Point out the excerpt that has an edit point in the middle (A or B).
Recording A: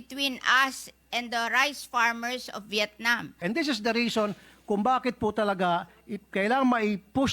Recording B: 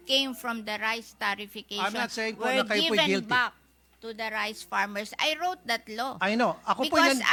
A